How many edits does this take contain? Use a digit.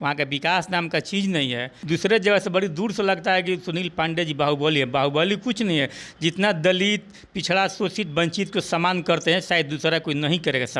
1